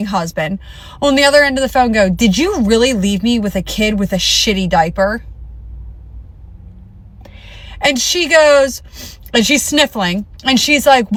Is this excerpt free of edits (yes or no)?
yes